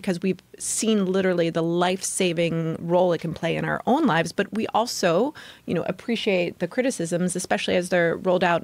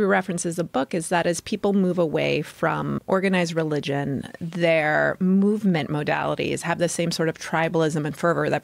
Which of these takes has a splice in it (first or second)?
second